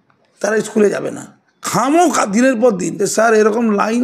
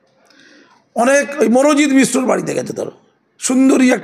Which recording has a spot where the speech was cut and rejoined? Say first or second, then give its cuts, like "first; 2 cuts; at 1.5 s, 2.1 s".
first; 1 cut; at 2.9 s